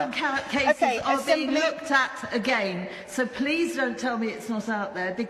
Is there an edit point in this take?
no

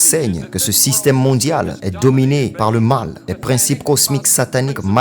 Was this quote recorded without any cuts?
no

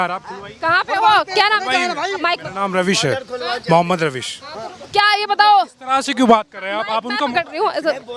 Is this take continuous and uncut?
yes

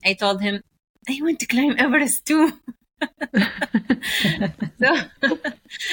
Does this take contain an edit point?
no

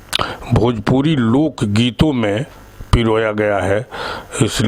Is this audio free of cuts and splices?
yes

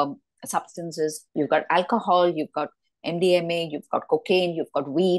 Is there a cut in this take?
yes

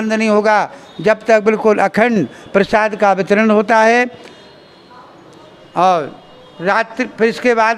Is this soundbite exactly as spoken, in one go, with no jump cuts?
yes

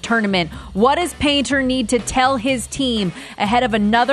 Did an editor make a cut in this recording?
no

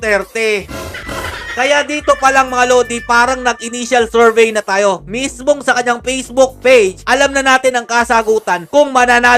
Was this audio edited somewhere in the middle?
no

